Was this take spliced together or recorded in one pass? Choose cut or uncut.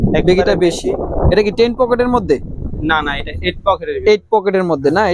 uncut